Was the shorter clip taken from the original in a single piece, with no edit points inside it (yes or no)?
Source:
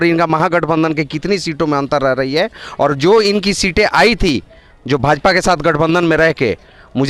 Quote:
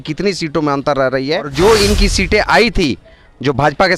no